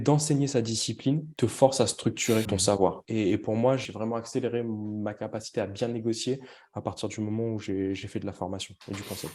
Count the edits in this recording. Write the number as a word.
three